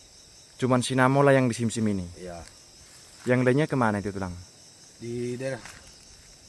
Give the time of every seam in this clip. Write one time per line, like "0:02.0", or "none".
none